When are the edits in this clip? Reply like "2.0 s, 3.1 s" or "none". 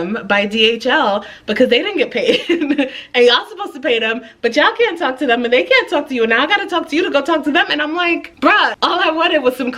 8.7 s